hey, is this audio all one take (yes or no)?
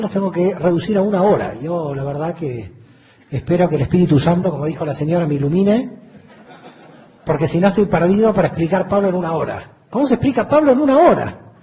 no